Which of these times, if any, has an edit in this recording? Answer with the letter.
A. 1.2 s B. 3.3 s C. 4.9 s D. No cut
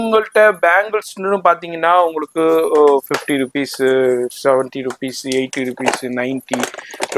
D